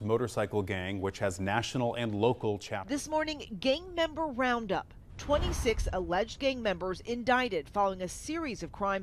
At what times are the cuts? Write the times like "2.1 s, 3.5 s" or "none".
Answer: 2.8 s